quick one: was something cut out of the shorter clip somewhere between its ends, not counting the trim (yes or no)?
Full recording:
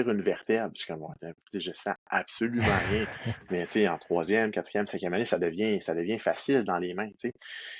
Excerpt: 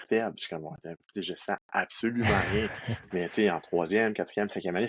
no